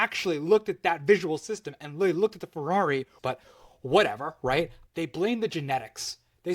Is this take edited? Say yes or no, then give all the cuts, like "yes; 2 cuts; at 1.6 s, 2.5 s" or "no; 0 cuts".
yes; 2 cuts; at 3.1 s, 4.8 s